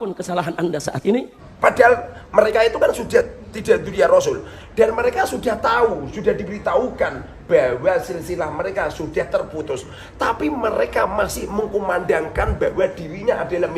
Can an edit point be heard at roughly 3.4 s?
no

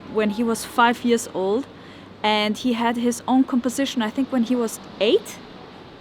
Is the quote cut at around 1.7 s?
no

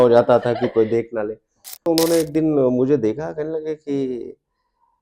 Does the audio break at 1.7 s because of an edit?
yes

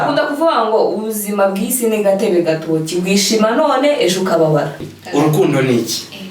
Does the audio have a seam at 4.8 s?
yes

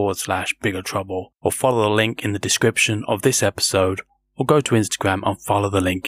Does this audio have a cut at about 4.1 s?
no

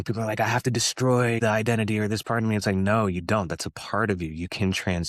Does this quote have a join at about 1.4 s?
yes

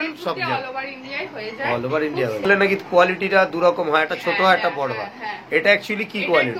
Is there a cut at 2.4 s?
yes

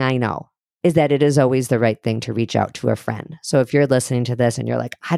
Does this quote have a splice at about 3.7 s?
yes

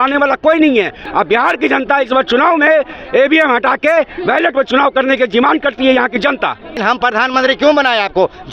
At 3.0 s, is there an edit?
no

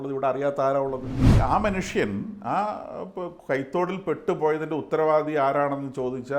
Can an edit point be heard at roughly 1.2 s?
yes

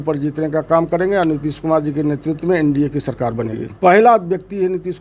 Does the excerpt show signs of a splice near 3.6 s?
yes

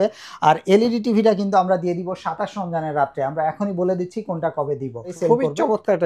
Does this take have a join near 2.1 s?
no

